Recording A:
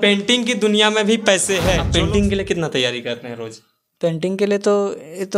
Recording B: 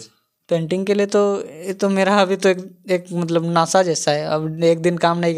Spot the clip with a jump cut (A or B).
A